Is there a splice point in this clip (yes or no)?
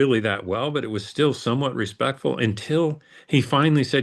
no